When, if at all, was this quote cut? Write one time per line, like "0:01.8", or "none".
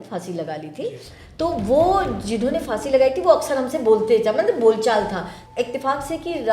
0:05.4